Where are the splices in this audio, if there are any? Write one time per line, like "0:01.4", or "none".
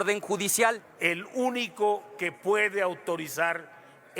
0:00.9